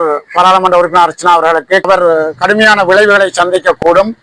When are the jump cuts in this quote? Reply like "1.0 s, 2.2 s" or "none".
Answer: 1.9 s